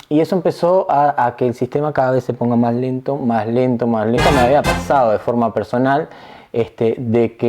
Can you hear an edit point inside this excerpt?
yes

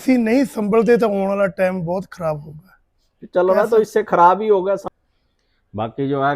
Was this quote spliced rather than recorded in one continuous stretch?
yes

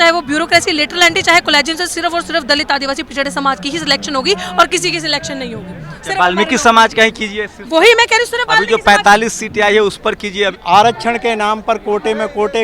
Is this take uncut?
no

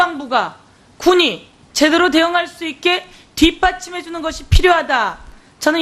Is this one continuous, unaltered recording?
no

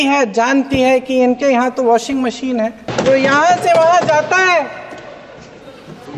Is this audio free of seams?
no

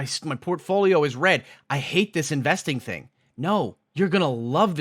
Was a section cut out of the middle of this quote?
yes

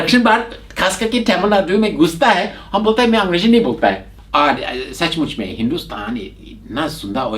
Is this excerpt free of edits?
no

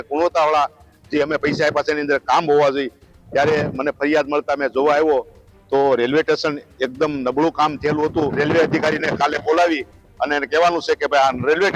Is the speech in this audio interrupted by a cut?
yes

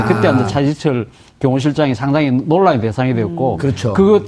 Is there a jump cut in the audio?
yes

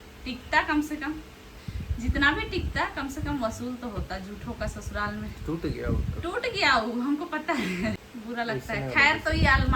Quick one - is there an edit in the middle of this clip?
yes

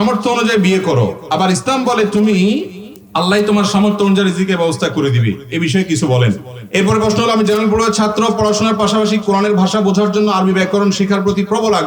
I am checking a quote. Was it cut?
yes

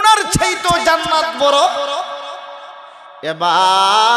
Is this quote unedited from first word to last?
yes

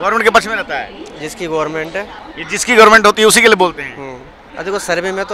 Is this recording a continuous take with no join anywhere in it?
yes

